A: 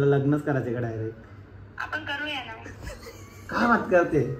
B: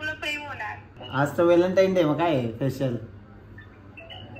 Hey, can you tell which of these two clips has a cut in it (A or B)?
B